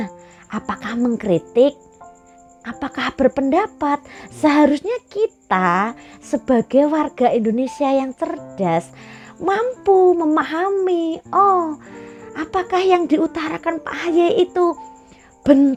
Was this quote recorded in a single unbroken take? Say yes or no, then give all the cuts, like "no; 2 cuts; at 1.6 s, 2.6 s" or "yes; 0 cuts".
yes; 0 cuts